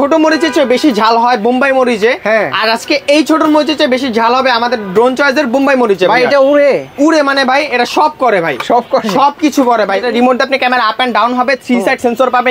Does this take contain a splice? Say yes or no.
yes